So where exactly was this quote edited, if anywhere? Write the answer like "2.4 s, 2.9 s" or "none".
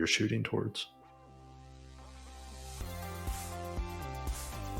0.9 s